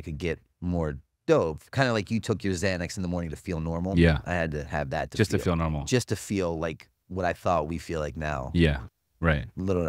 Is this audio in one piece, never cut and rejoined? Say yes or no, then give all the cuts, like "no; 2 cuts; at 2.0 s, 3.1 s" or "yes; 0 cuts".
yes; 0 cuts